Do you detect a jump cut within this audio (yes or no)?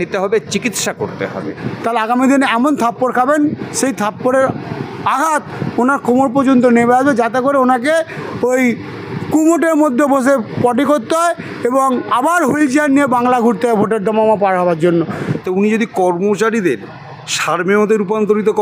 yes